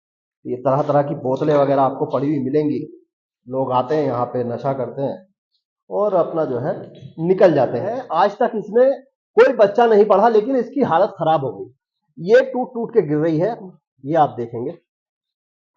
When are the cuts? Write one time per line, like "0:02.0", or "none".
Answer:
0:08.0